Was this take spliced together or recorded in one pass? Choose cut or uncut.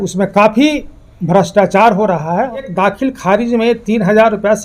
cut